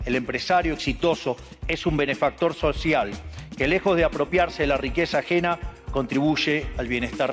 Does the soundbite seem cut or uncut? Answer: uncut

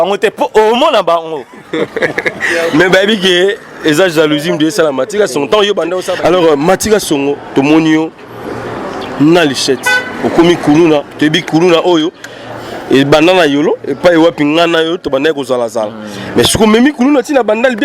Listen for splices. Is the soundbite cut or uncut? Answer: cut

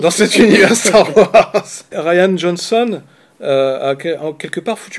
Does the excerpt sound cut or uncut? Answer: cut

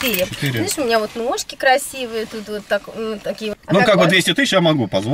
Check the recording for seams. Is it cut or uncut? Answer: cut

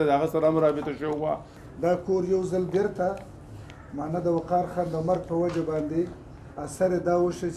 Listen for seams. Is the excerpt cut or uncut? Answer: cut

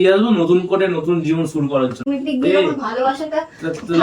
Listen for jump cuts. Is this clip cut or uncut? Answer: cut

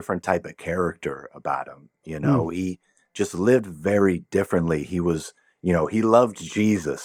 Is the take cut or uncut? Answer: uncut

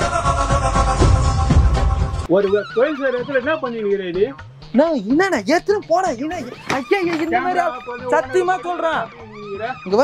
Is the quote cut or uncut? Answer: uncut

